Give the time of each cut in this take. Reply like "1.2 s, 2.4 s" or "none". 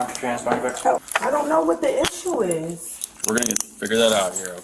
1.1 s